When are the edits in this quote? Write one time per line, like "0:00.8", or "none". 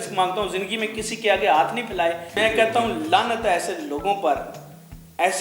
0:02.3